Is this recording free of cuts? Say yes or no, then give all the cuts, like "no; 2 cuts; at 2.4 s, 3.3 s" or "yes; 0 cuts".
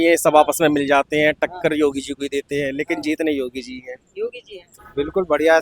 no; 1 cut; at 4.7 s